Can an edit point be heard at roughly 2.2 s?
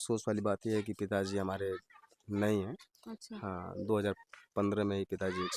no; 0 cuts

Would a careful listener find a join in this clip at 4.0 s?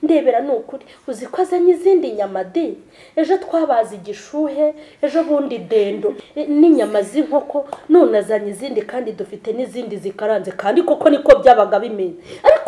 no; 1 cut; at 6.2 s

